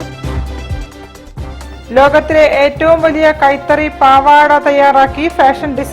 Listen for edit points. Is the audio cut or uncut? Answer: uncut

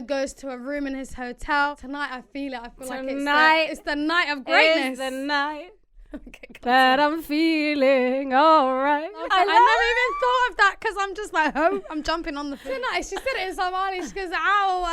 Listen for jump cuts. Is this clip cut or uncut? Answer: cut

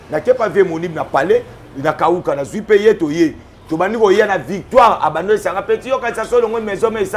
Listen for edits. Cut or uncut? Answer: uncut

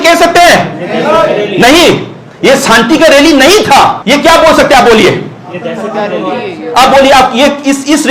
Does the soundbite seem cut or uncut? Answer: cut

